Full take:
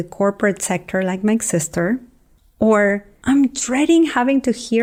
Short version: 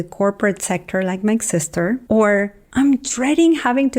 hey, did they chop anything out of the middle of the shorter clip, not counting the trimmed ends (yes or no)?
yes